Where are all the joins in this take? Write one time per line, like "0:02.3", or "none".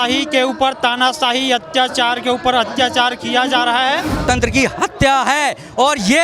0:04.2